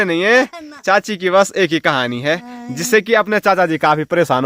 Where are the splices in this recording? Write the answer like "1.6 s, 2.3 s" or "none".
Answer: none